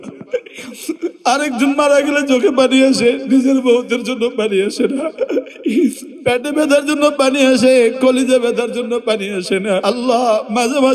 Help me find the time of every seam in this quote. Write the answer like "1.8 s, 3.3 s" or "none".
5.1 s, 9.8 s